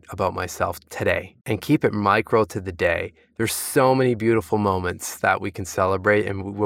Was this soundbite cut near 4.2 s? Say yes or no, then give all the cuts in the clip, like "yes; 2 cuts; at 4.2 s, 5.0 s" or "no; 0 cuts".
no; 1 cut; at 1.3 s